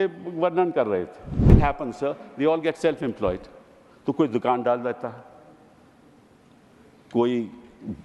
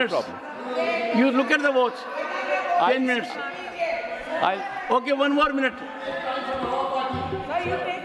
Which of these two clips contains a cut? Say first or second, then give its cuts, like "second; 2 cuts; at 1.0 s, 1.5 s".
first; 1 cut; at 1.6 s